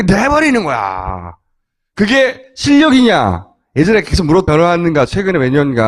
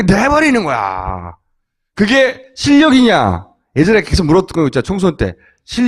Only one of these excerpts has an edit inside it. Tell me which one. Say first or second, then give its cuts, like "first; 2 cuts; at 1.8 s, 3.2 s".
second; 1 cut; at 4.5 s